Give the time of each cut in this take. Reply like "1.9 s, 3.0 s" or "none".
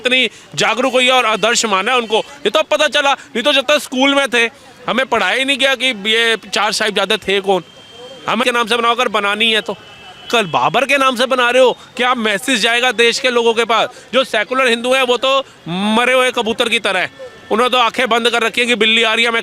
8.4 s